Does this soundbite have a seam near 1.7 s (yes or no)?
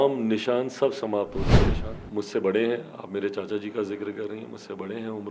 yes